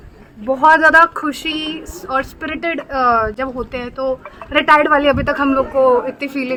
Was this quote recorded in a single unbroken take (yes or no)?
yes